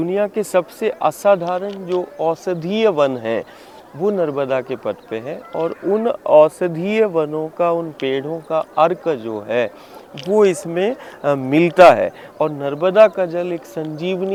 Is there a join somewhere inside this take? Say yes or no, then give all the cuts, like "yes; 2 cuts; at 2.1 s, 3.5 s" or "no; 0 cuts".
no; 0 cuts